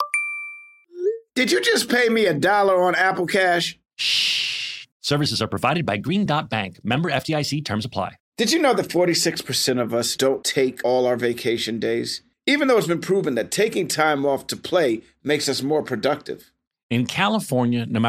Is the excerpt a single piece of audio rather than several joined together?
no; 1 cut; at 8.2 s

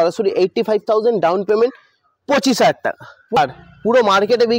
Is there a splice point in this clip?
yes; 1 cut; at 3.4 s

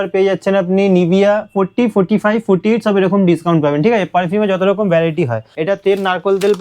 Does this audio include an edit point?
yes; 1 cut; at 5.5 s

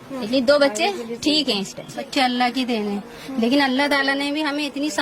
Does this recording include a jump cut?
yes; 1 cut; at 2.0 s

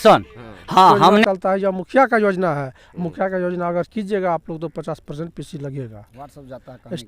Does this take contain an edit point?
yes; 1 cut; at 1.2 s

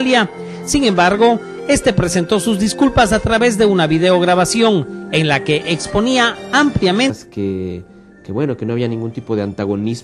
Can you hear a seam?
no; 0 cuts

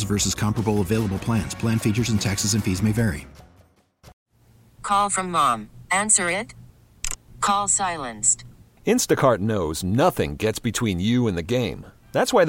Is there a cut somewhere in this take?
yes; 1 cut; at 4.2 s

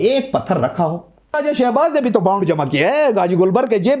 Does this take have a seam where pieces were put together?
yes; 1 cut; at 1.4 s

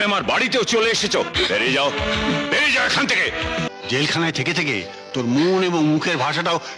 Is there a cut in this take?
yes; 1 cut; at 3.7 s

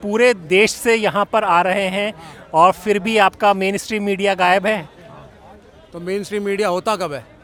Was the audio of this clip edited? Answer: no; 0 cuts

